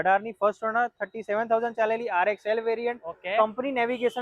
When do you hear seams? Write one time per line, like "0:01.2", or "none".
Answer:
none